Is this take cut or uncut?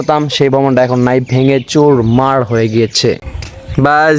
cut